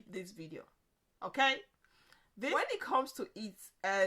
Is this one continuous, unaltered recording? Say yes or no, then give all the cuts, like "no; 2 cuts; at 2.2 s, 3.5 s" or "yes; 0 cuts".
no; 1 cut; at 2.5 s